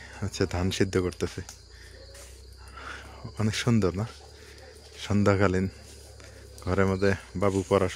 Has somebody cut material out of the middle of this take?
no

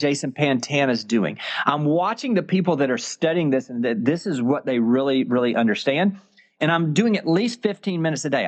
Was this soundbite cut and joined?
no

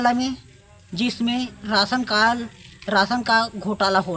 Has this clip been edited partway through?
no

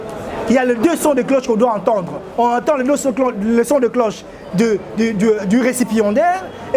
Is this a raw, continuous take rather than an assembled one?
yes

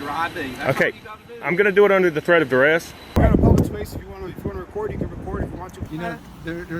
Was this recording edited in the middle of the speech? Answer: yes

